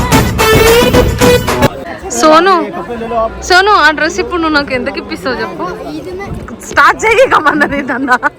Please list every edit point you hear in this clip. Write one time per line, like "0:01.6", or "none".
0:01.8